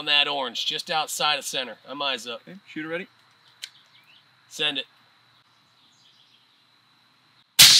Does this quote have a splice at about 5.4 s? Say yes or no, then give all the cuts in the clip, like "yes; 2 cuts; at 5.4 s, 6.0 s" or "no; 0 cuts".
yes; 1 cut; at 5.4 s